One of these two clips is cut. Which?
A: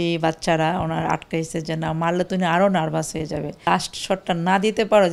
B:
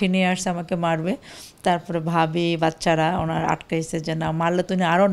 A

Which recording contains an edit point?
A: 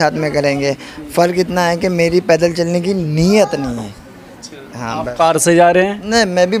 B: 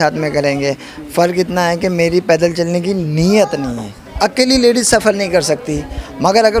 B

